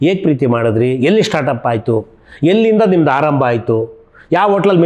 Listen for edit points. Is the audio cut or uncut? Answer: uncut